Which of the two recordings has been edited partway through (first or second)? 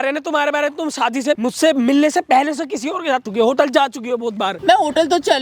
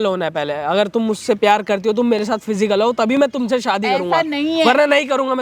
first